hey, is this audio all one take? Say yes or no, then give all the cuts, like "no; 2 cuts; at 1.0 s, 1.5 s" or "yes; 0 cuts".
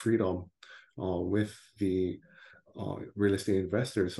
yes; 0 cuts